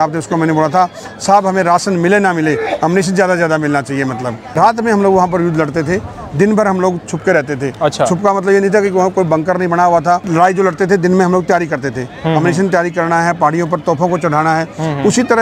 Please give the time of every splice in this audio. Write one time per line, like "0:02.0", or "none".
none

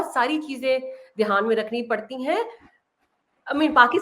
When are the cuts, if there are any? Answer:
none

